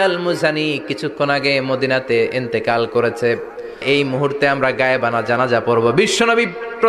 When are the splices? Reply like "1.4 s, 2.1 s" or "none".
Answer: 3.8 s